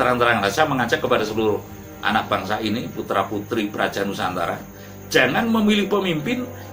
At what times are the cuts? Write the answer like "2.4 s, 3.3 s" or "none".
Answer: none